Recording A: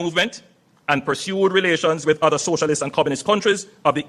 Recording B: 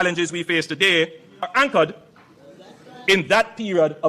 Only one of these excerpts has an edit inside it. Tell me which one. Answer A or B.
B